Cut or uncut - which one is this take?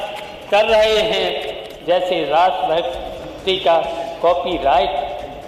cut